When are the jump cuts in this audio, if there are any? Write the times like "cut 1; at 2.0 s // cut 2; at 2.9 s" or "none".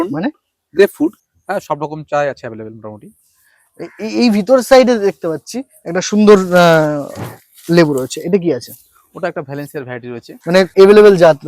cut 1; at 1.2 s